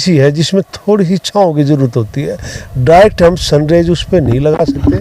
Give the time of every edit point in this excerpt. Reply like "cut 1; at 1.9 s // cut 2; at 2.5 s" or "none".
none